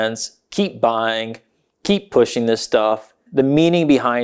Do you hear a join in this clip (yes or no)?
yes